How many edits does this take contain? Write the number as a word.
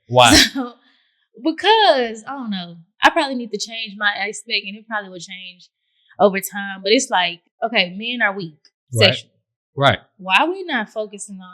one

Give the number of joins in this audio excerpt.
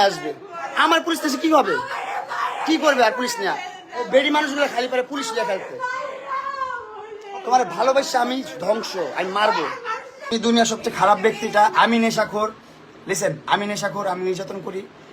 one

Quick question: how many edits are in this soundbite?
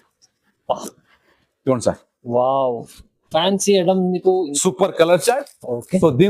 one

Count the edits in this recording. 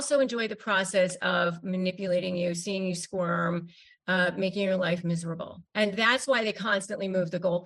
one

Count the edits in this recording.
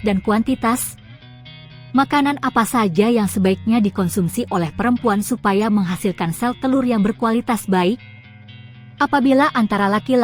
two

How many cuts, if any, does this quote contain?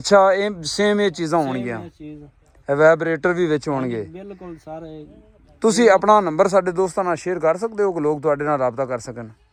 zero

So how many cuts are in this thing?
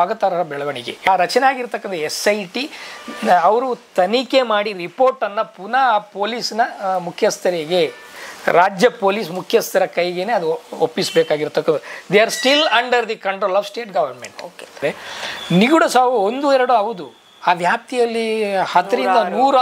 two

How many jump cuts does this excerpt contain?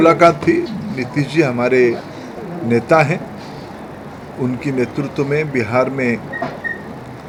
zero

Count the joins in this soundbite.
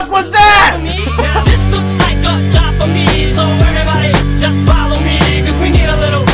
one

